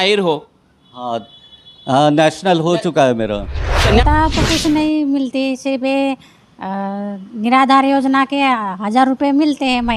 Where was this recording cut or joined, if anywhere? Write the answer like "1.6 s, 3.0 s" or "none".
4.0 s